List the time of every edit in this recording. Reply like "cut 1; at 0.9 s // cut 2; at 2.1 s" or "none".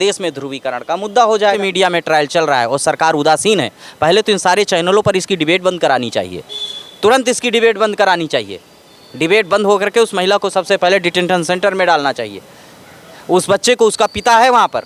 cut 1; at 1.6 s